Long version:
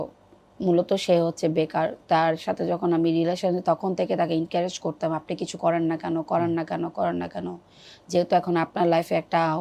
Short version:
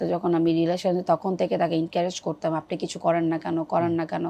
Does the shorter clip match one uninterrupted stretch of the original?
yes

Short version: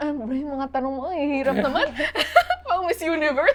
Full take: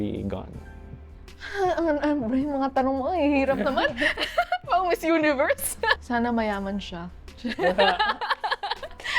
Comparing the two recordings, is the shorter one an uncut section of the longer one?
yes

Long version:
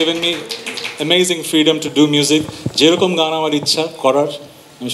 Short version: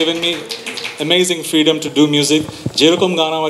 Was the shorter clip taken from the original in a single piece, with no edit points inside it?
yes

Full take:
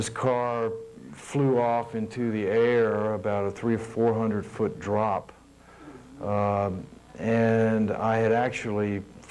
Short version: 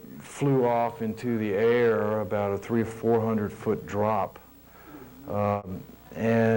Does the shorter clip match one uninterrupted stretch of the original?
no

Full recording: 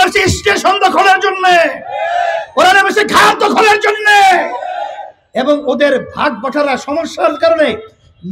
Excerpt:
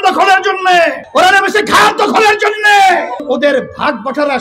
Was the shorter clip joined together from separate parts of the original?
yes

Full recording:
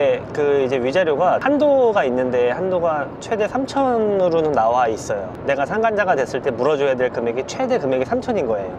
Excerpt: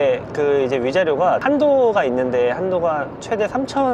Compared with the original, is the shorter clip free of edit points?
yes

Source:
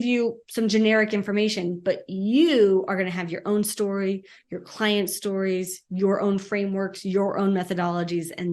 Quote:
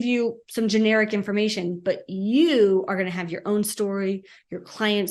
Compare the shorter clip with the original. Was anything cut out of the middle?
no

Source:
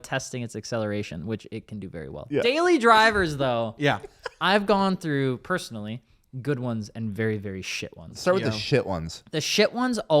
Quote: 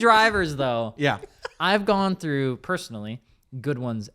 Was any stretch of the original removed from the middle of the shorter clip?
no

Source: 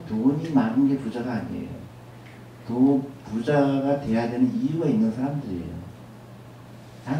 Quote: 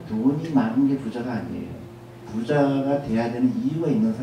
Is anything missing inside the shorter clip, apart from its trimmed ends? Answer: yes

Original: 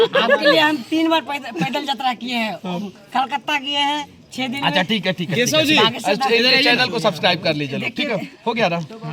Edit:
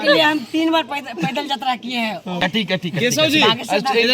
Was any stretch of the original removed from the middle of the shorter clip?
yes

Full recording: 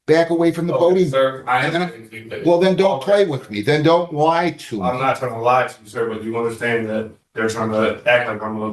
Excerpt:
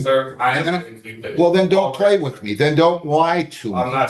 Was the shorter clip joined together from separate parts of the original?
no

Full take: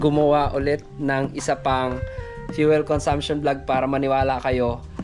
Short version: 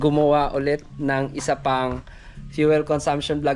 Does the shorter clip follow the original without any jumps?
yes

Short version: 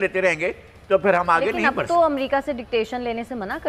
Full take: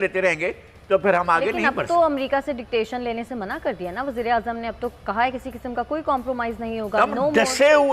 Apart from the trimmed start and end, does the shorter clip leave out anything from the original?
no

